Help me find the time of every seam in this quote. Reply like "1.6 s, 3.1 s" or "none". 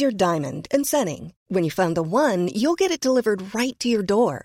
none